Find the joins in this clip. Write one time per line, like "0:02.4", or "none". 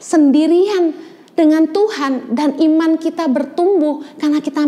none

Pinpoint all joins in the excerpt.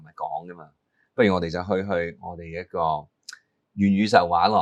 none

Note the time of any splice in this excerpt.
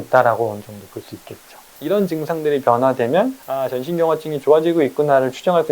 0:01.7
0:03.5

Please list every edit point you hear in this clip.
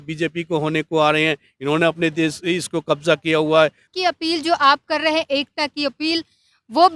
0:03.9

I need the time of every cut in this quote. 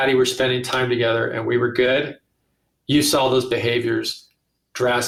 none

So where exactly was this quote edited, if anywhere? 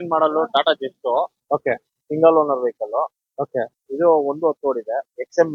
none

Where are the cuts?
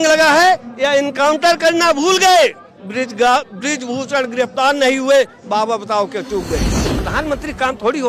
0:07.0

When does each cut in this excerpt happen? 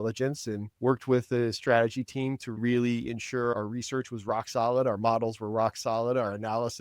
0:02.6

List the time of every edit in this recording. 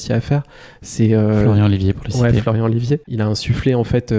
0:03.1

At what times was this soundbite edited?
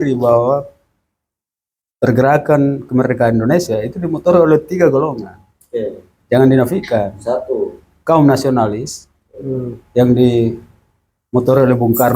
none

